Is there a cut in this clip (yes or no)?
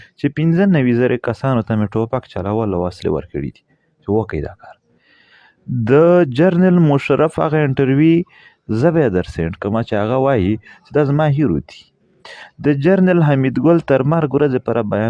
no